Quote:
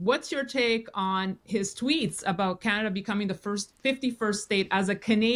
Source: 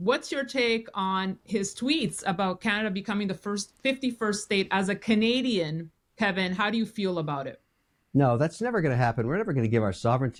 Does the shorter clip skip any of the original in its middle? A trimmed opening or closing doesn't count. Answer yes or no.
no